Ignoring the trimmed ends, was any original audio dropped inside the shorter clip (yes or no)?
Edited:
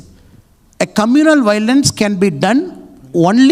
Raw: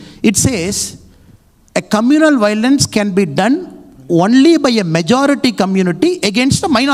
no